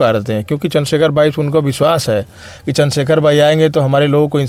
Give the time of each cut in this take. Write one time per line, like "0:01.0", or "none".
none